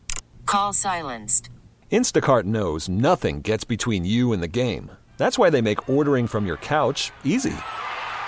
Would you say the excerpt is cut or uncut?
uncut